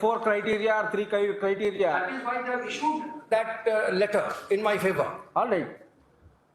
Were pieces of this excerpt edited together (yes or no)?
no